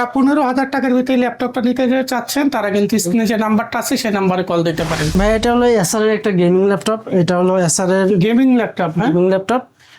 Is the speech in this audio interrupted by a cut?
yes; 1 cut; at 5.1 s

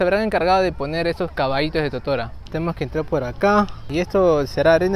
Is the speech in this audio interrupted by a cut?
no; 0 cuts

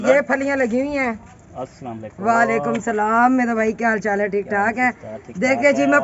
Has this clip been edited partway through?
no; 0 cuts

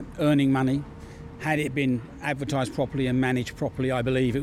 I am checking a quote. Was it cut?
no; 0 cuts

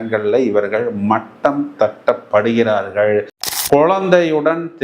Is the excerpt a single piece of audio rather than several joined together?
no; 1 cut; at 3.4 s

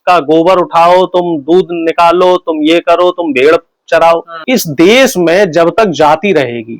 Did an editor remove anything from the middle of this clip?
yes; 1 cut; at 4.4 s

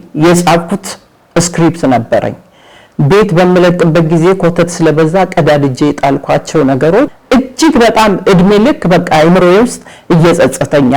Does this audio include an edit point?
yes; 1 cut; at 7.1 s

